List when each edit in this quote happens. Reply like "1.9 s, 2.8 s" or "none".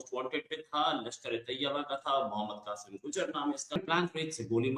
3.8 s

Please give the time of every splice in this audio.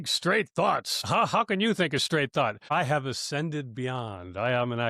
1.0 s, 2.6 s

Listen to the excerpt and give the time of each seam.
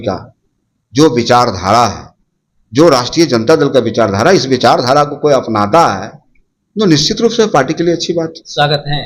none

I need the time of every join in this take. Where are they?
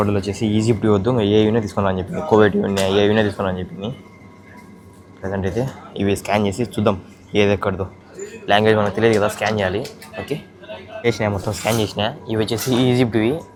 none

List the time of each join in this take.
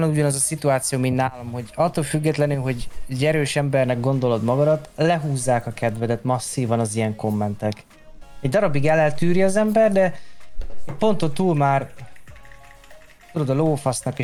none

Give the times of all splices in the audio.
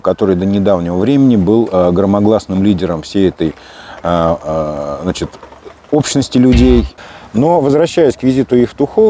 7.0 s

